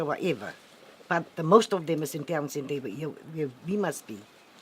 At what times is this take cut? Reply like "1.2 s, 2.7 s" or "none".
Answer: 3.6 s